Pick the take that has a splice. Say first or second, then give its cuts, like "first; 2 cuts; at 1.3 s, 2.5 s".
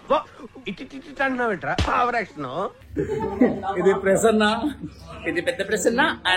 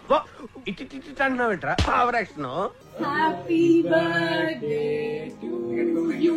second; 1 cut; at 2.8 s